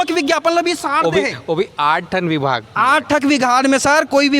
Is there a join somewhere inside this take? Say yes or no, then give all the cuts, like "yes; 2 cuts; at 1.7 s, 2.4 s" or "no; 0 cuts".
no; 0 cuts